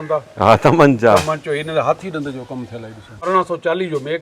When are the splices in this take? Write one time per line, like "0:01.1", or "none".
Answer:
0:03.1